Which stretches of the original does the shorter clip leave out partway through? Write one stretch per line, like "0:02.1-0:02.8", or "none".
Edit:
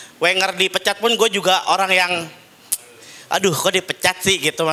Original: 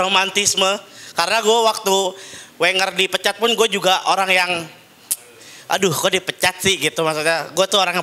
none